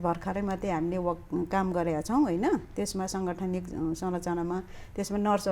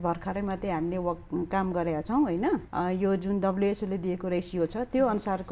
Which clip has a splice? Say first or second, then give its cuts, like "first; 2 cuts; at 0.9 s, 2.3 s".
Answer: second; 1 cut; at 2.7 s